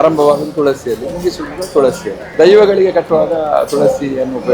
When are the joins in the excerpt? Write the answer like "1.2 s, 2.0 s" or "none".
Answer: 2.2 s